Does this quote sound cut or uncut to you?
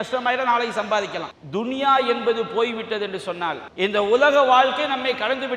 cut